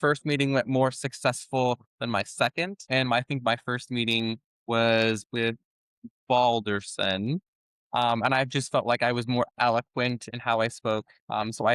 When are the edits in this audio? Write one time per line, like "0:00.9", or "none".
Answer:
0:02.8